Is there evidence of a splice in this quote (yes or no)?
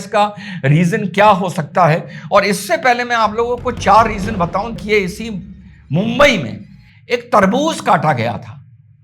yes